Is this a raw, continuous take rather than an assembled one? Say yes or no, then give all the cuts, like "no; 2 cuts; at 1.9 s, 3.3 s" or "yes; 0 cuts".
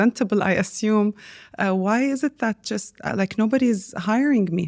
yes; 0 cuts